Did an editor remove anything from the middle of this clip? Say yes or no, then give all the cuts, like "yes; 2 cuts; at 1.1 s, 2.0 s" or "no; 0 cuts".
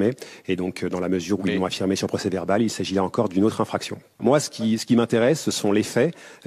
yes; 1 cut; at 4.2 s